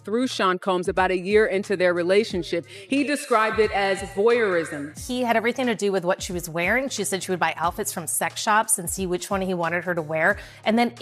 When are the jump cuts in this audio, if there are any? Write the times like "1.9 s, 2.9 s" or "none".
4.9 s